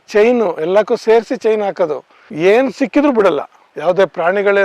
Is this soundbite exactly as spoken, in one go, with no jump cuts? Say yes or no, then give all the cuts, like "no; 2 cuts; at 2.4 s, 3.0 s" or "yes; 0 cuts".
yes; 0 cuts